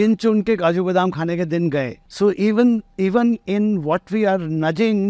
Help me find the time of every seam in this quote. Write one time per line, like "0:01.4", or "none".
0:02.0

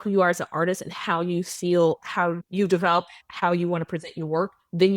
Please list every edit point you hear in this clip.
0:02.4
0:03.2

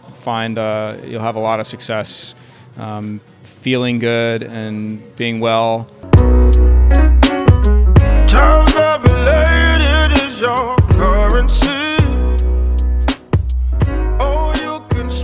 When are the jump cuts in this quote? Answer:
0:05.9

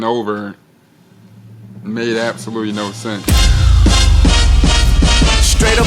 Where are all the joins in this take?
0:03.2

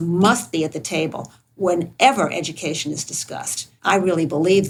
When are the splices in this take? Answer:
none

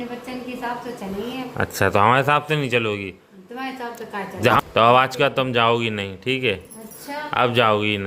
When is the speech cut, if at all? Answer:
0:04.6

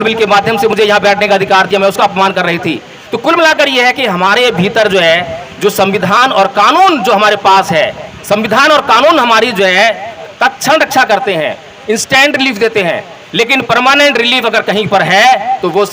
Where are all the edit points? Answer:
0:10.1

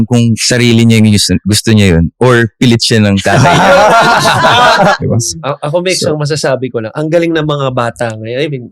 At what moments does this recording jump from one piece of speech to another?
0:05.0

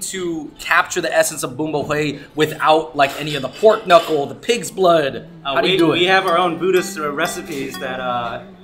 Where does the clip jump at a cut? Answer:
none

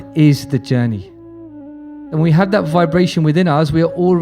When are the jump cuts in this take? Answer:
none

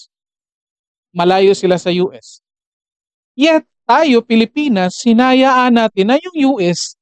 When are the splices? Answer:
none

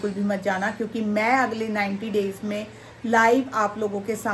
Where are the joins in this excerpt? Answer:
none

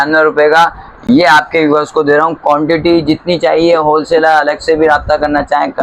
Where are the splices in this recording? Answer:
none

